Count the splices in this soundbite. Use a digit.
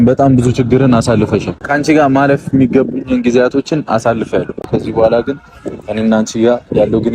2